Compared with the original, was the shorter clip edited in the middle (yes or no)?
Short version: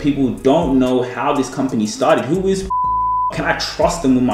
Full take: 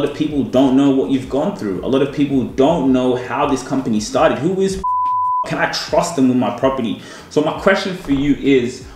no